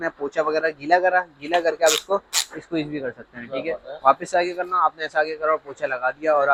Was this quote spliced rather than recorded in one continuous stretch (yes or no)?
no